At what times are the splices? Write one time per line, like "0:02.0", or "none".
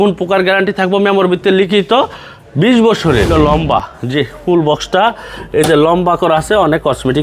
0:03.3